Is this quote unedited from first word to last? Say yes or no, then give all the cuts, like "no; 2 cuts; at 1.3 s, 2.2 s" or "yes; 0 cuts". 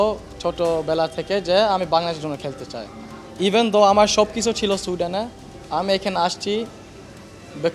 yes; 0 cuts